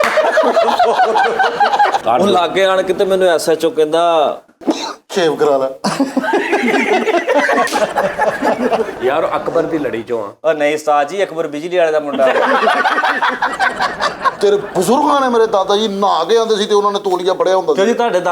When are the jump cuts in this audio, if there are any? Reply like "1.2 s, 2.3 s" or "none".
2.0 s, 8.9 s, 14.4 s